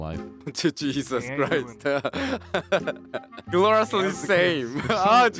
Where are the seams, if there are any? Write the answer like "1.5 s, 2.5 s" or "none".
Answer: 3.4 s